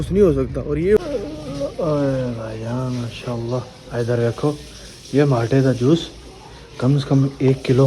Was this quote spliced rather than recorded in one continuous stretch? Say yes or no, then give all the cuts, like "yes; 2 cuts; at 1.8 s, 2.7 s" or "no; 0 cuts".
yes; 1 cut; at 1.0 s